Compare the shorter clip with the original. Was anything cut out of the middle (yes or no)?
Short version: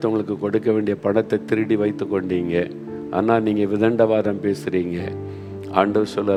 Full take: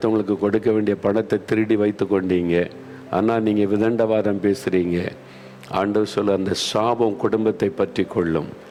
no